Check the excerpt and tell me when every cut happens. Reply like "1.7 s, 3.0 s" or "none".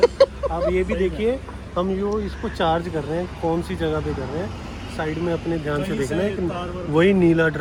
none